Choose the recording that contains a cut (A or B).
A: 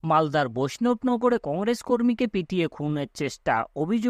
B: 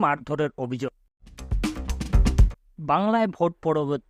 B